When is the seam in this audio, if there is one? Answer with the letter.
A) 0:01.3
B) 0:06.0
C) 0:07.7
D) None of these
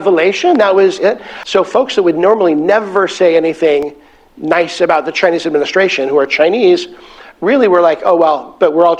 A